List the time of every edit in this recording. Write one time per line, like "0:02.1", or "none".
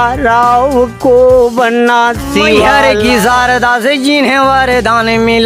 0:02.9